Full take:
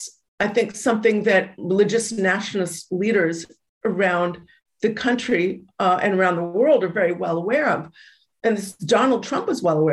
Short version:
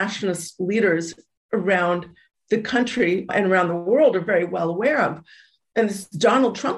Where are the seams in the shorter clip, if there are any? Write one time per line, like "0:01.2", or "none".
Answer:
0:03.3